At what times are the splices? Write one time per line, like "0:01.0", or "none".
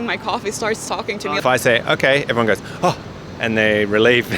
0:01.4